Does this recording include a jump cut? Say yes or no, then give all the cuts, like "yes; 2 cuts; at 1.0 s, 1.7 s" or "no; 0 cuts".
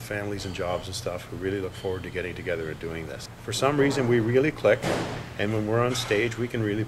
yes; 1 cut; at 3.3 s